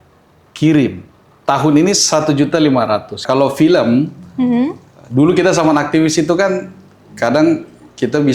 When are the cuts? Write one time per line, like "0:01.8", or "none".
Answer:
0:03.2